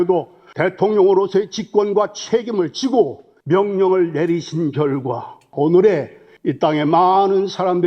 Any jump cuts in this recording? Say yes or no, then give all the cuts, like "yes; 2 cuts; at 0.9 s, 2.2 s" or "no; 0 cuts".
yes; 1 cut; at 5.5 s